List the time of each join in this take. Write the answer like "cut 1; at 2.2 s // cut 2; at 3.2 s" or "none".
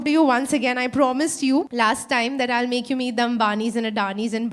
cut 1; at 1.7 s